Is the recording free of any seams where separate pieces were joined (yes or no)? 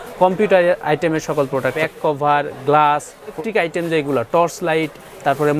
no